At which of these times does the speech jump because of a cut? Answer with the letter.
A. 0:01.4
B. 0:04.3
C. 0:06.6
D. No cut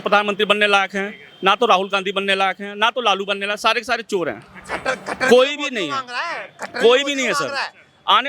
D